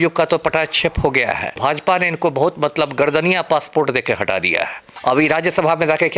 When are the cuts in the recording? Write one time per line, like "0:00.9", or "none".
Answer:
0:01.6
0:04.9